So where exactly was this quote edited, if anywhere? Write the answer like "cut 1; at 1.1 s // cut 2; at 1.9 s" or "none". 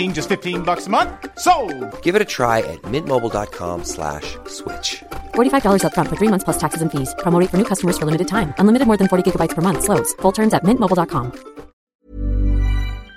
cut 1; at 11.9 s